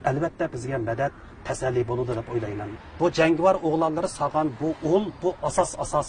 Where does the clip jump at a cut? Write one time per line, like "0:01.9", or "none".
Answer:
0:02.7